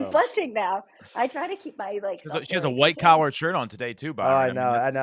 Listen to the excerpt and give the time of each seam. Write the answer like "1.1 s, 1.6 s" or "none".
none